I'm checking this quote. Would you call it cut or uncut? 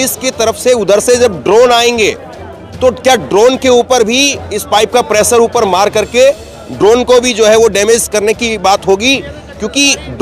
uncut